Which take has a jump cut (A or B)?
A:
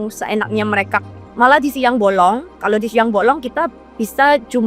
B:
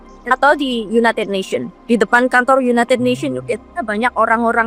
A